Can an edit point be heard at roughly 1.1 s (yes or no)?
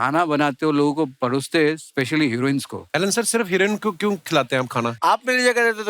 no